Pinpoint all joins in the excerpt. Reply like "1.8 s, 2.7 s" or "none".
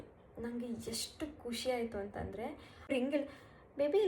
2.9 s

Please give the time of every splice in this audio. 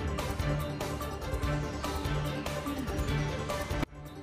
2.9 s

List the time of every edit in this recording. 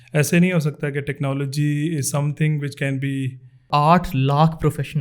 3.6 s

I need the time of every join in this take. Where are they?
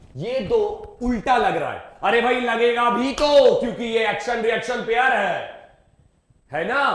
none

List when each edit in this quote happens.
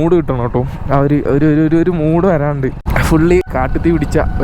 2.9 s, 3.5 s

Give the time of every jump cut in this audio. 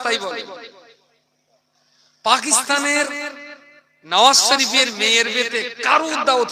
none

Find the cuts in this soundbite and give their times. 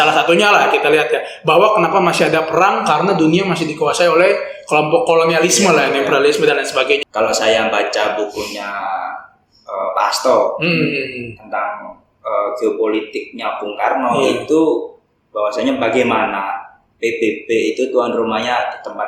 7.0 s

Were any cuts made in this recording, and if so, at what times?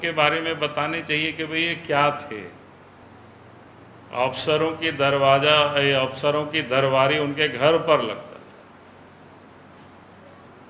3.0 s

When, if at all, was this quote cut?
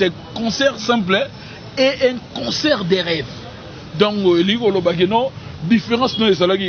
none

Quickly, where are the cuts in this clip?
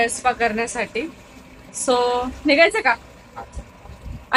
none

